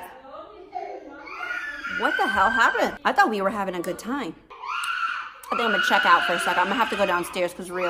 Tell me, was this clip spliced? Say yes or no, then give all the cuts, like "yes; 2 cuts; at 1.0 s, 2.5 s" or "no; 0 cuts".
yes; 2 cuts; at 3.0 s, 4.5 s